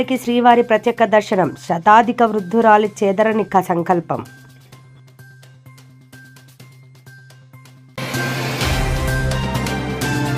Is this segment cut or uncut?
uncut